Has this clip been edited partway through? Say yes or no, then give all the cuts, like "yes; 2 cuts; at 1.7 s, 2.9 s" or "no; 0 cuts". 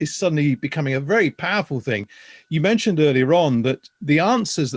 no; 0 cuts